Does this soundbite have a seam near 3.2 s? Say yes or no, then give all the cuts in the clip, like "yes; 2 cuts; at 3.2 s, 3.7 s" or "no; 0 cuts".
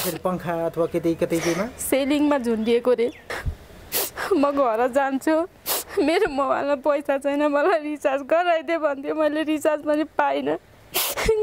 yes; 1 cut; at 3.2 s